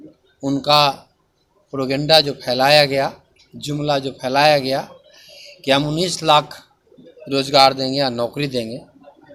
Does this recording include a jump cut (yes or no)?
no